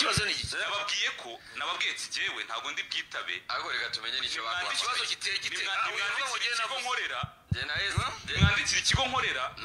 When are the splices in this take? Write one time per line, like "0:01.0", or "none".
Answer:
none